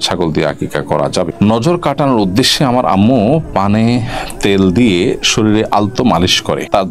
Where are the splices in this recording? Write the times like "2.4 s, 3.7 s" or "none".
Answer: 1.3 s